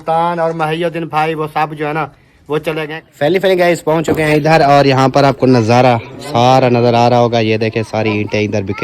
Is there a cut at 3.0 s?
yes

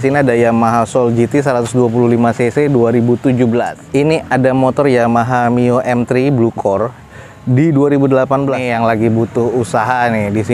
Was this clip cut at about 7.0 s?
no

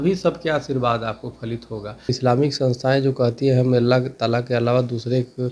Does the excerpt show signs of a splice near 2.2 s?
yes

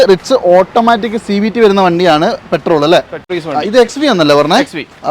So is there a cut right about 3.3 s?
yes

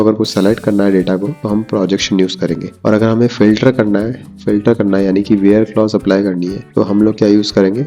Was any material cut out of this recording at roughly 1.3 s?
yes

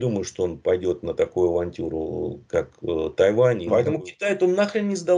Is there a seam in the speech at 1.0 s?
no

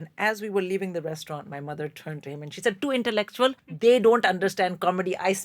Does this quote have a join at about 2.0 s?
no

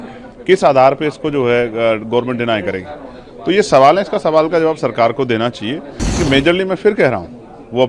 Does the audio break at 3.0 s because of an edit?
no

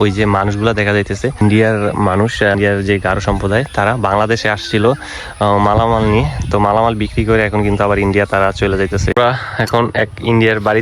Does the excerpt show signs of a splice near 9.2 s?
yes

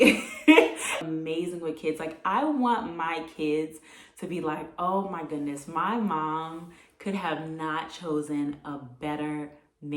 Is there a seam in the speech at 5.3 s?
no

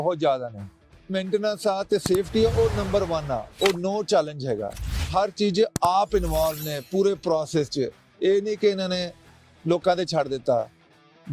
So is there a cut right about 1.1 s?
yes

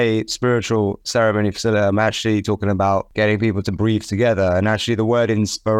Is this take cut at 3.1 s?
yes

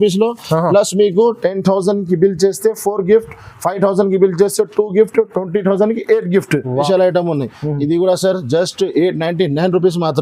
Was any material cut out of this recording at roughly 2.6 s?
no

